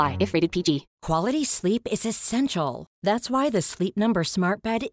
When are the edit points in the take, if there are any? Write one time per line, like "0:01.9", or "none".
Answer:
0:00.9